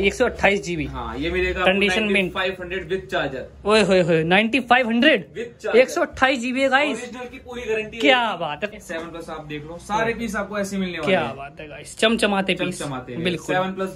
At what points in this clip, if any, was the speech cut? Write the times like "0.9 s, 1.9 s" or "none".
8.7 s